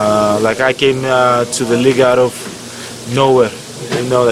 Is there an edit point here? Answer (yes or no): no